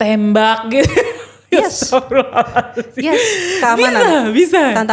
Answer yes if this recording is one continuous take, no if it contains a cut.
yes